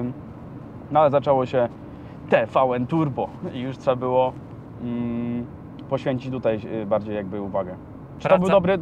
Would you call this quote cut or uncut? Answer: uncut